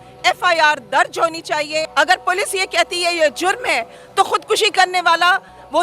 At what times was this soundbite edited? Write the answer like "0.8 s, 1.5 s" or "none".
1.9 s